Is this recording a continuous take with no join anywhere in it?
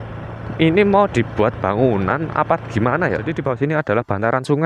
no; 1 cut; at 3.3 s

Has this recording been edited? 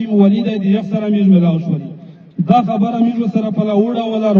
no; 0 cuts

